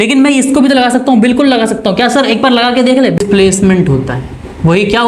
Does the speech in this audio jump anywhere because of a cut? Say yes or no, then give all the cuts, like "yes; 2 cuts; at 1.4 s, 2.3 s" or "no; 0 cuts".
yes; 1 cut; at 3.2 s